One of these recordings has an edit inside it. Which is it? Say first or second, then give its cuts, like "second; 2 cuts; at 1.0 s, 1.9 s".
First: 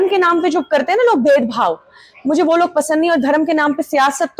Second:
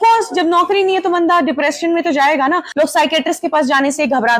second; 1 cut; at 2.7 s